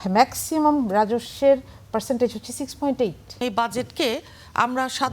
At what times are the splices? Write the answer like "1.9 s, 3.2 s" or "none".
3.4 s